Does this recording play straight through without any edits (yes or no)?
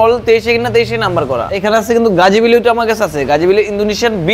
no